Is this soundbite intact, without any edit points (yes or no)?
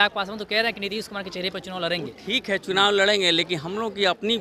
yes